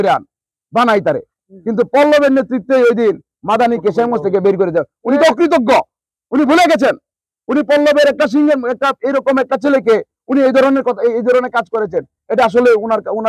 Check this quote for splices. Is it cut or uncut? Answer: uncut